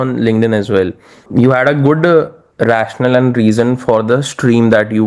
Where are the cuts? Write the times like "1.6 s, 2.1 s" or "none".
1.2 s